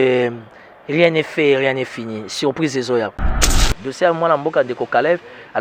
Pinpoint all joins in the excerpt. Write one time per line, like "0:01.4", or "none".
0:03.4